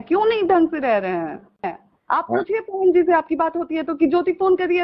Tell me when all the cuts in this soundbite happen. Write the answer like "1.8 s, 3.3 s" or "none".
1.9 s